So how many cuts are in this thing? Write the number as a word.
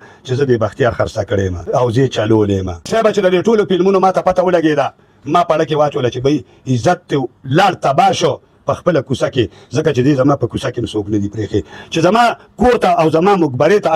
two